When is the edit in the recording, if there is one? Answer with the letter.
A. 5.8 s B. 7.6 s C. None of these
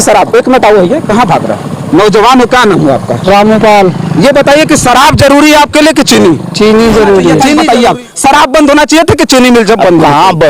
B